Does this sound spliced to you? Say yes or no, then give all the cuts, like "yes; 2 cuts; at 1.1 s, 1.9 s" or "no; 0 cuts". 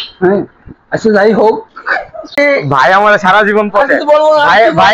yes; 1 cut; at 2.3 s